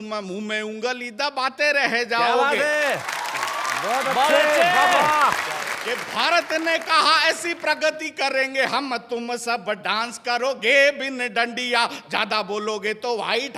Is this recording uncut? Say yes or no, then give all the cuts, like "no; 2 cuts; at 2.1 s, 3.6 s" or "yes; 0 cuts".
no; 1 cut; at 5.7 s